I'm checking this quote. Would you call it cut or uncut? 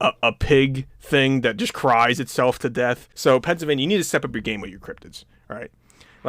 cut